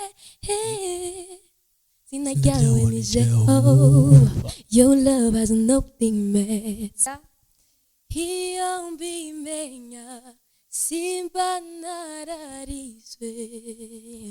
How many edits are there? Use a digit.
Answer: 1